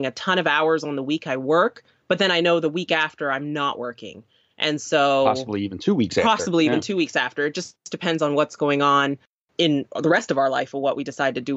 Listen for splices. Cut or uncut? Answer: uncut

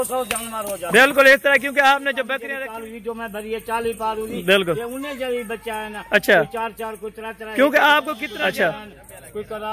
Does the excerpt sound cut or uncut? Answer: cut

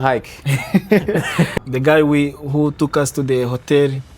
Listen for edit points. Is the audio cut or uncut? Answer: cut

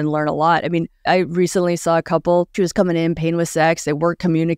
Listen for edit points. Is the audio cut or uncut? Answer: cut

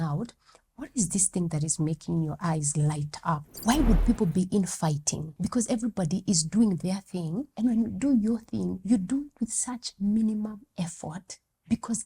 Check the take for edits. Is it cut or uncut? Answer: cut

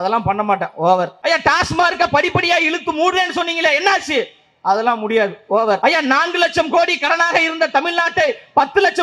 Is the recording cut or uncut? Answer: cut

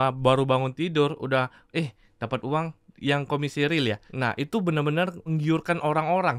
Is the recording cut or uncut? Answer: cut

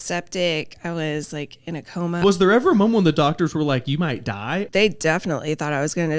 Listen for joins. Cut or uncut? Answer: cut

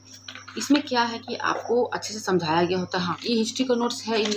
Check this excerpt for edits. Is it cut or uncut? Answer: cut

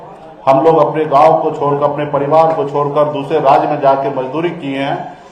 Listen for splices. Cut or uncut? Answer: uncut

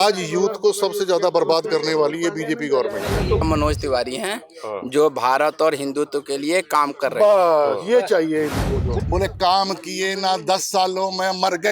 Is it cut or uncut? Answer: cut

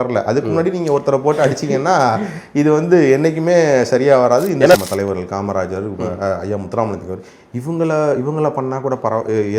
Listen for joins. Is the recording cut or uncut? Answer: cut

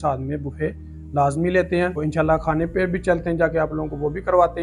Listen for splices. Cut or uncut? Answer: uncut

